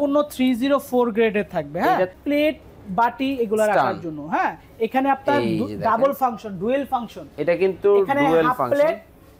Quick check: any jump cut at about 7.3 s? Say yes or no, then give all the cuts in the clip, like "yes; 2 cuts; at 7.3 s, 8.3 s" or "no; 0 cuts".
no; 1 cut; at 2.2 s